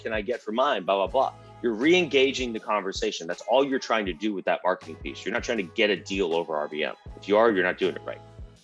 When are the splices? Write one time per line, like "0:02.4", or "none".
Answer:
none